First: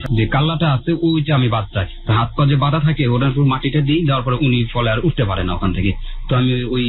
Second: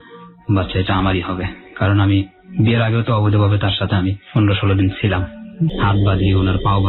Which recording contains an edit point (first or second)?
second